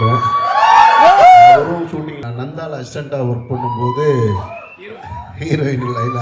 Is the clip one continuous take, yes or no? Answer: no